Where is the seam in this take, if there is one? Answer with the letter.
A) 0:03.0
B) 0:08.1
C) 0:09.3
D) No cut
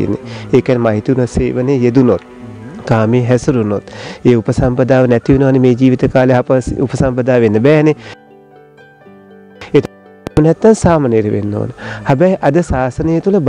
D